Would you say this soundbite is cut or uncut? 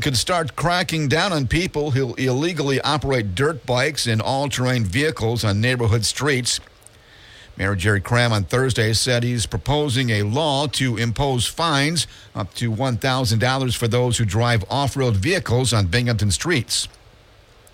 uncut